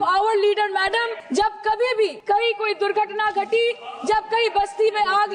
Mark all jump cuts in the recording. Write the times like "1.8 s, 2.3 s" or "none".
1.2 s, 2.2 s